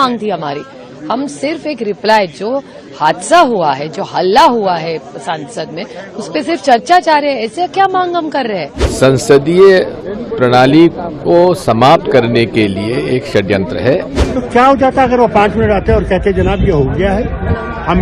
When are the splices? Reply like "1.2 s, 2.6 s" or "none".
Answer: 8.8 s, 14.2 s